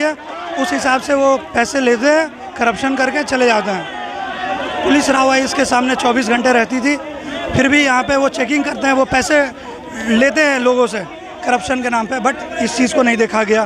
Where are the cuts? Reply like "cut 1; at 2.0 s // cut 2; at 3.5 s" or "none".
none